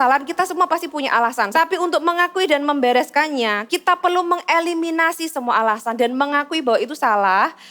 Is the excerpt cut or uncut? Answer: cut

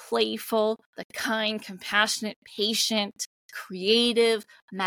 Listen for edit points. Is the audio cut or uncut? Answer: uncut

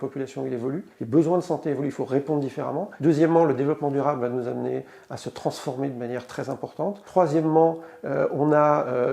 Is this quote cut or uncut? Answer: cut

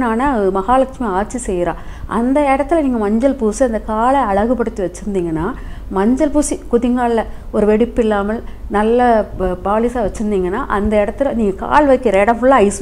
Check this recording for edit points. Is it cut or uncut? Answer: uncut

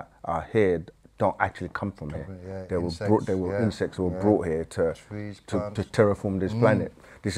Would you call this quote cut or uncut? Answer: uncut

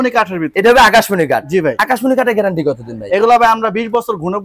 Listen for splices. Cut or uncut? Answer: uncut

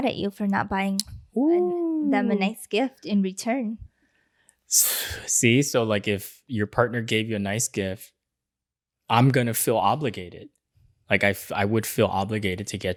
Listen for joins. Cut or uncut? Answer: uncut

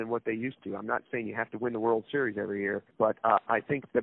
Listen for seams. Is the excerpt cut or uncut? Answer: cut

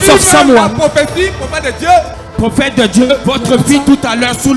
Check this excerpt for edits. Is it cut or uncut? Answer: cut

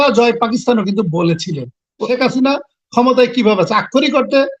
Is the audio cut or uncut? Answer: cut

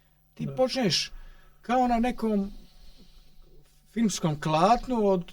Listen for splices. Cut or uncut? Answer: uncut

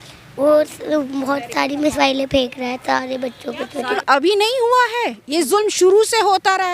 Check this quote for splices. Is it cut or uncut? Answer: cut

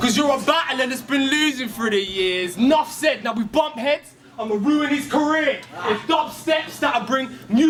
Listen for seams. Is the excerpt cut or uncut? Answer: uncut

